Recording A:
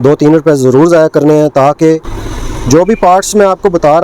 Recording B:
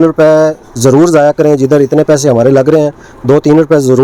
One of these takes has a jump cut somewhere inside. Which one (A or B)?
A